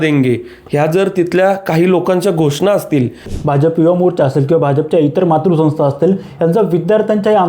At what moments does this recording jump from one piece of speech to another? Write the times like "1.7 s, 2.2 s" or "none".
3.3 s